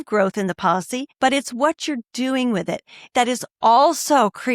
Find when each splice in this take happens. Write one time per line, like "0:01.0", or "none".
0:01.0
0:03.1